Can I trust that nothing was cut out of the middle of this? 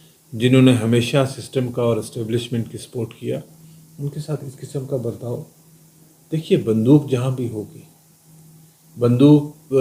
yes; 0 cuts

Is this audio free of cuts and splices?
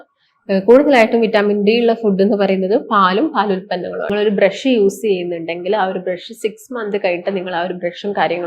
no; 1 cut; at 4.1 s

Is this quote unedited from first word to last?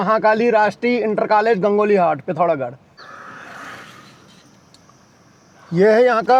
no; 1 cut; at 3.2 s

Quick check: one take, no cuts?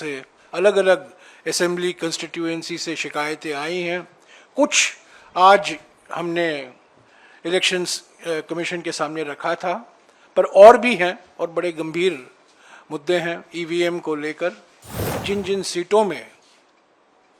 no; 1 cut; at 15.1 s

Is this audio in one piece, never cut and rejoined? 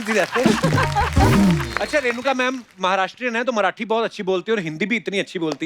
no; 1 cut; at 1.8 s

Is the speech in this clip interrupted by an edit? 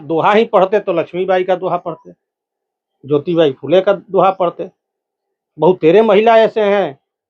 no; 0 cuts

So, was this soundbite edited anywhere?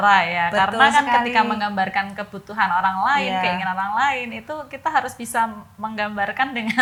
no; 0 cuts

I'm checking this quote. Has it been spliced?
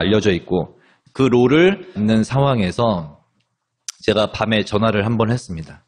no; 0 cuts

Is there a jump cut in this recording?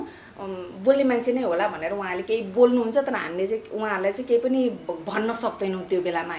no; 0 cuts

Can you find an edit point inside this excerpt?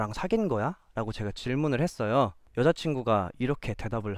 yes; 1 cut; at 2.4 s

